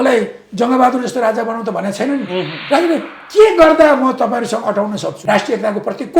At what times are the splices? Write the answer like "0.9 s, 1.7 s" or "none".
5.1 s